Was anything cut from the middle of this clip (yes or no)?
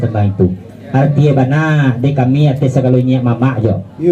no